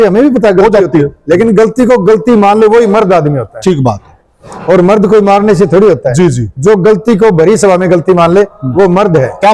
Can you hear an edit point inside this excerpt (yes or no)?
no